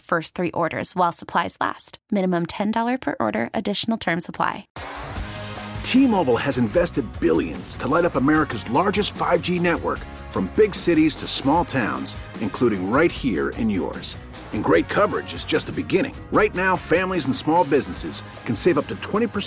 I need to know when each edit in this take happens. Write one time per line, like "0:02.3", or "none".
0:04.7